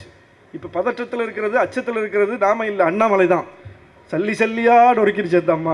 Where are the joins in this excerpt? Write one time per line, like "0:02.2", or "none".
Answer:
none